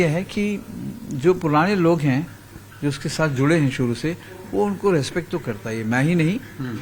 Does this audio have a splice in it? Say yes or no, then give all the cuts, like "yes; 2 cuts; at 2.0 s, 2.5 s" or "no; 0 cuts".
no; 0 cuts